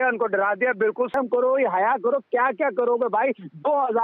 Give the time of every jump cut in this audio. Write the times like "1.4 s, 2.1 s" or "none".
1.1 s